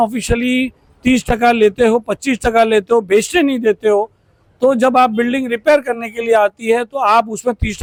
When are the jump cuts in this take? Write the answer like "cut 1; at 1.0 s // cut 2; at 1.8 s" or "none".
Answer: none